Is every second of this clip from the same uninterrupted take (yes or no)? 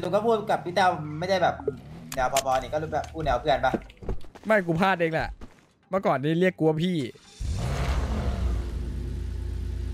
yes